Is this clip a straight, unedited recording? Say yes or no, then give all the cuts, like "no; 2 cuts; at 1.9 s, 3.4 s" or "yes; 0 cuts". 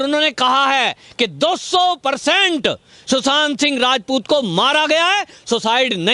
yes; 0 cuts